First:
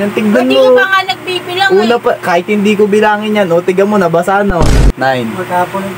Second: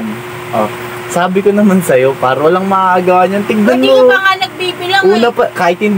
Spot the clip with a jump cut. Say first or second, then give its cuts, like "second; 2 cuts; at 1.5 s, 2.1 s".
first; 1 cut; at 4.6 s